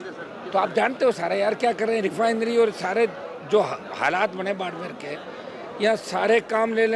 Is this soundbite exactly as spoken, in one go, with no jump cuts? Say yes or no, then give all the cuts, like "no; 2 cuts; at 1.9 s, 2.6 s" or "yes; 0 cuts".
yes; 0 cuts